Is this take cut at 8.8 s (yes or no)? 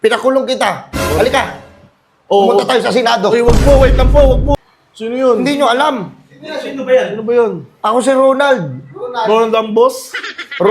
no